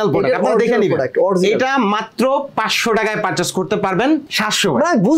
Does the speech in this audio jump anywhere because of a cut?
yes; 1 cut; at 4.3 s

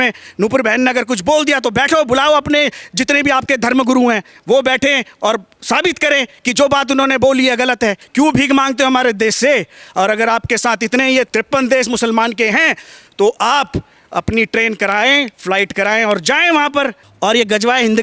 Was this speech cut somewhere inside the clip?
yes; 3 cuts; at 8.0 s, 11.3 s, 17.0 s

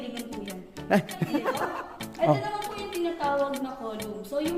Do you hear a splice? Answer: yes; 1 cut; at 1.6 s

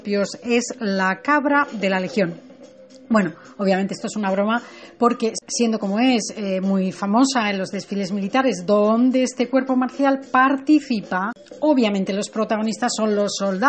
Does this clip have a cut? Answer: yes; 1 cut; at 4.7 s

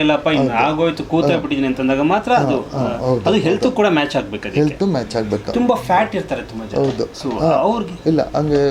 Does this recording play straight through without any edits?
yes; 0 cuts

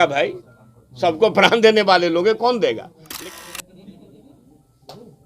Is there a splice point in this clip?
yes; 1 cut; at 3.3 s

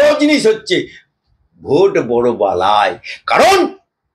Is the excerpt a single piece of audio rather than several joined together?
yes; 0 cuts

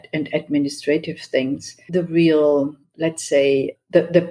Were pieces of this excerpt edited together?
yes; 2 cuts; at 1.7 s, 2.8 s

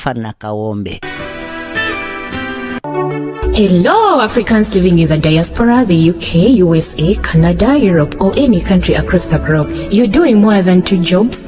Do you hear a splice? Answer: yes; 1 cut; at 2.8 s

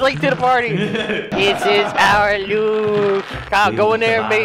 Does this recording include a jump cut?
yes; 2 cuts; at 1.3 s, 3.4 s

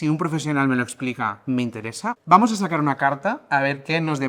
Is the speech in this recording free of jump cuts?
no; 1 cut; at 2.1 s

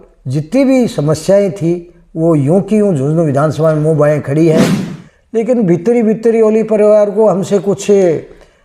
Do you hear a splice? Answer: yes; 1 cut; at 4.7 s

